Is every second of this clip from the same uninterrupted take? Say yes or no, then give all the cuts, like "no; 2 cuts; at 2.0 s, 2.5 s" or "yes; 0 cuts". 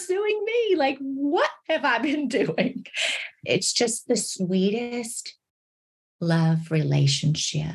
no; 1 cut; at 3.4 s